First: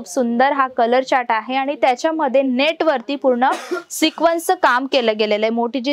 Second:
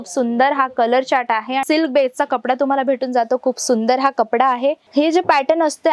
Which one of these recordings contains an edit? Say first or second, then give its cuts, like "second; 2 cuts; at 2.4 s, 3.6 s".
second; 2 cuts; at 1.6 s, 4.8 s